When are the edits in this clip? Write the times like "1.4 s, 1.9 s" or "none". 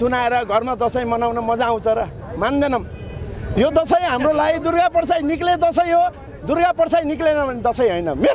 none